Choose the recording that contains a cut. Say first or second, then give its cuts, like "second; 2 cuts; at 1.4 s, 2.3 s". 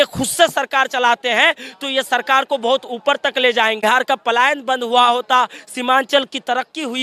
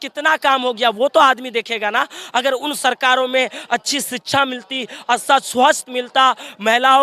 first; 1 cut; at 3.8 s